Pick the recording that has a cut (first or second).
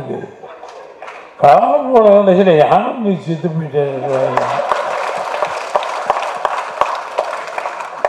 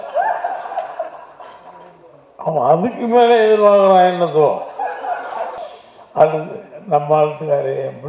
second